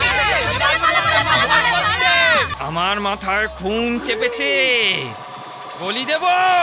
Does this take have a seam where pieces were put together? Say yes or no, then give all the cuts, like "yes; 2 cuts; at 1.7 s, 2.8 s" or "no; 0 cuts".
yes; 1 cut; at 2.5 s